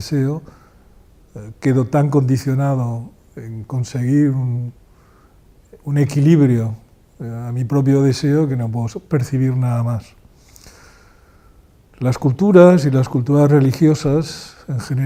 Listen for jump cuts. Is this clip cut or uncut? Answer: uncut